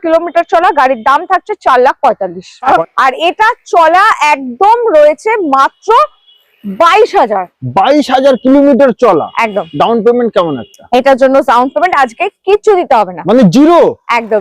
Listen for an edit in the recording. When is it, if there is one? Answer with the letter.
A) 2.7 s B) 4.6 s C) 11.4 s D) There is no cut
A